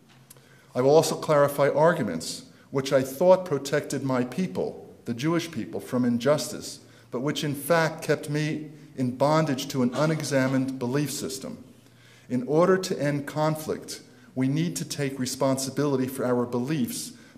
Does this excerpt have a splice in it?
yes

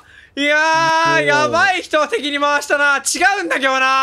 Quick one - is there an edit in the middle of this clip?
no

